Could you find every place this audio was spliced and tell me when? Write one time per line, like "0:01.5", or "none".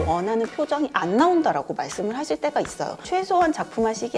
0:03.0